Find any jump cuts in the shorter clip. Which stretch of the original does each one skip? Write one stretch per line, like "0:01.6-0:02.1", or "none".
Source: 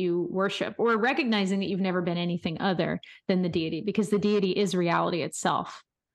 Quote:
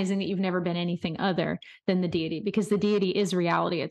none